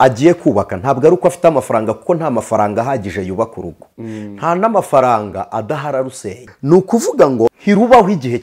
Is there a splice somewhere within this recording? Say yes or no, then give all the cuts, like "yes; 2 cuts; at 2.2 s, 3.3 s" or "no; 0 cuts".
yes; 2 cuts; at 6.5 s, 7.6 s